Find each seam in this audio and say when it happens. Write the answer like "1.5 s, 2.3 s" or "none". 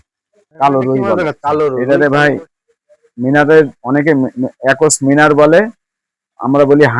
1.8 s